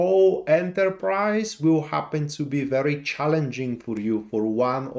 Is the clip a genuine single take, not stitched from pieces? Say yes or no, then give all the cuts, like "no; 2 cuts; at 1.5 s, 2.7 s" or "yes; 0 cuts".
yes; 0 cuts